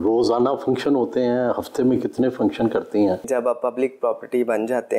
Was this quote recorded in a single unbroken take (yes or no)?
no